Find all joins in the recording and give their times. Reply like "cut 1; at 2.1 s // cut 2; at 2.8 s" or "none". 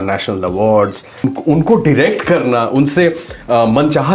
cut 1; at 1.2 s